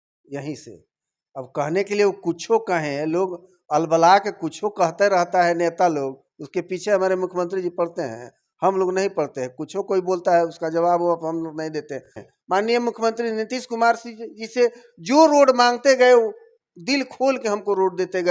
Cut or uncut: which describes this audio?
cut